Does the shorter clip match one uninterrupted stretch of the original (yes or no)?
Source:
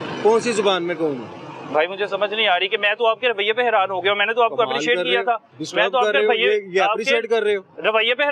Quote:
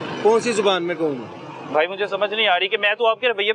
yes